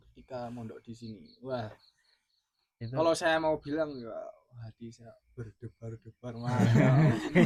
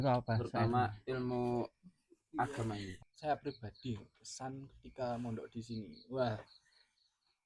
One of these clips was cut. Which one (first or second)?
second